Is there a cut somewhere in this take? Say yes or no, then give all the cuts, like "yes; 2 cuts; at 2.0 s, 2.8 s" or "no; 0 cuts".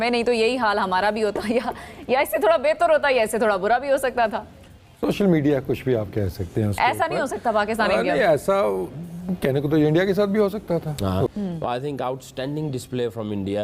no; 0 cuts